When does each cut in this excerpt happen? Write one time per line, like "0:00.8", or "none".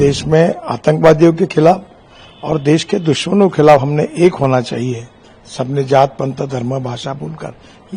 none